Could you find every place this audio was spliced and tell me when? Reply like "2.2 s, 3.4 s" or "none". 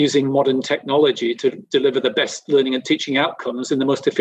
none